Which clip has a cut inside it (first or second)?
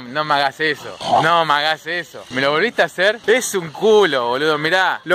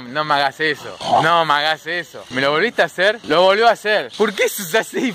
second